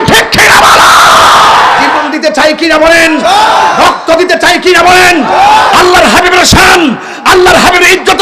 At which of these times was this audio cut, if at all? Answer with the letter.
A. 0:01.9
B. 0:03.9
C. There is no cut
A